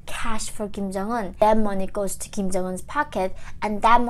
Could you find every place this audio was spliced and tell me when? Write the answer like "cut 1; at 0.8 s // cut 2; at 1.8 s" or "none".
cut 1; at 1.4 s